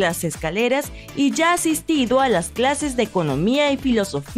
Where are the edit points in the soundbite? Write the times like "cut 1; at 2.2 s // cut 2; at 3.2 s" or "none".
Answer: none